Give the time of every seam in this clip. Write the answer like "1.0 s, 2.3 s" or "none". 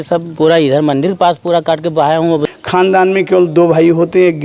2.4 s